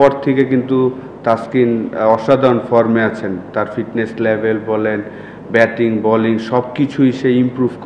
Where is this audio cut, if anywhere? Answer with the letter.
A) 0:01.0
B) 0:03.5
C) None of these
C